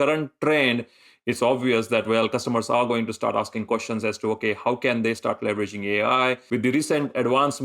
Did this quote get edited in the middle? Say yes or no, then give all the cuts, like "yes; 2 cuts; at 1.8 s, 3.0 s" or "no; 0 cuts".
yes; 1 cut; at 6.4 s